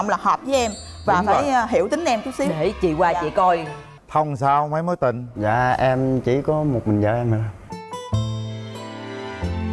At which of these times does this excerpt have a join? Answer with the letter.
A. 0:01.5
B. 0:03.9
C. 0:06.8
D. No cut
B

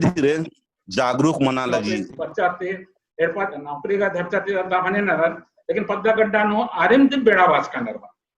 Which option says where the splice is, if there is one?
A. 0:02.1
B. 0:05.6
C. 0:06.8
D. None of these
A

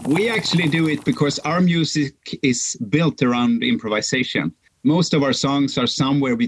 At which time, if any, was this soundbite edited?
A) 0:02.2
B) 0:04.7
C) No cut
B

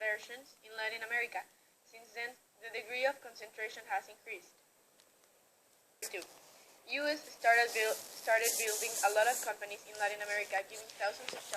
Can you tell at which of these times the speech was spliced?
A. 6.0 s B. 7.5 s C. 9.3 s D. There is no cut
A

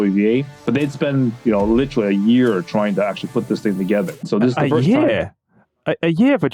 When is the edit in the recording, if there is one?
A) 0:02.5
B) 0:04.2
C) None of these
B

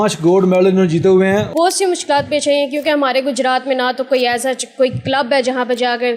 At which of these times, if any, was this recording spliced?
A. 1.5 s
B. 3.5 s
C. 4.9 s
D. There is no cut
A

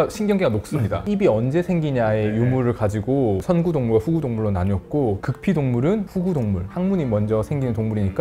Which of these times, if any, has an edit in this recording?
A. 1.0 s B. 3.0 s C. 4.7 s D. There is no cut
A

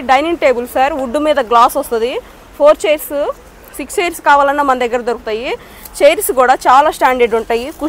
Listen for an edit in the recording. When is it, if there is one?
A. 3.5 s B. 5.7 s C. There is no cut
C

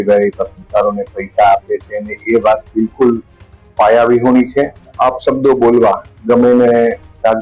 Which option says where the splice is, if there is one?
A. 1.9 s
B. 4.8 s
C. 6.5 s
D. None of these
B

